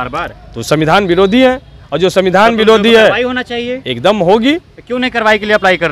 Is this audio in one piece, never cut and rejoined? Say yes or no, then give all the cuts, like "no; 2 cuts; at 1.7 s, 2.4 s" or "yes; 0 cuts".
yes; 0 cuts